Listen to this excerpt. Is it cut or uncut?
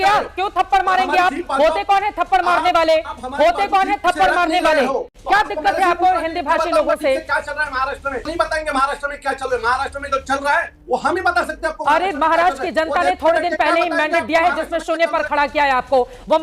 cut